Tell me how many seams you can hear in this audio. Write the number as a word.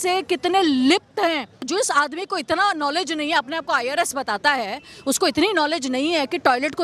one